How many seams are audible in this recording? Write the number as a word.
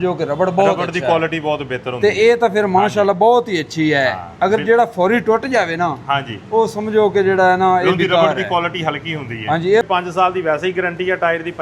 one